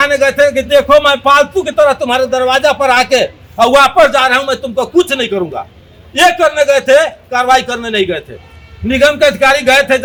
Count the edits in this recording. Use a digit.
0